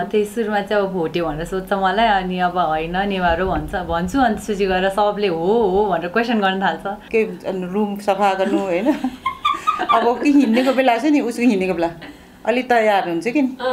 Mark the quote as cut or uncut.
cut